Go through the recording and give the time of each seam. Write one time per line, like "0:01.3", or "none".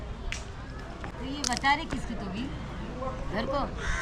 0:01.1